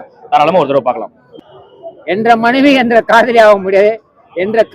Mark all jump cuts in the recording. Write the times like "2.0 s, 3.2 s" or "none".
1.3 s